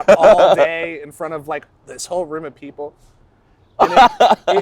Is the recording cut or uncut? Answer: uncut